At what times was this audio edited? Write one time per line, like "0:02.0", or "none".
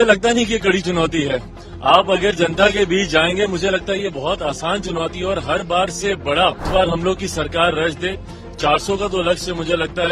0:06.7